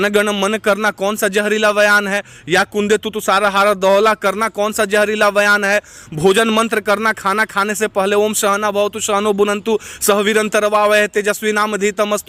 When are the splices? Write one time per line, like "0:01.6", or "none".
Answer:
none